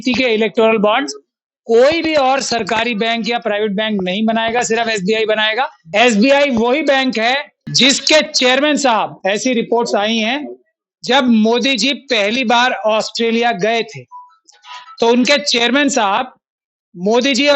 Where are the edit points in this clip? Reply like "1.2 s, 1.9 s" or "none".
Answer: 5.8 s, 7.6 s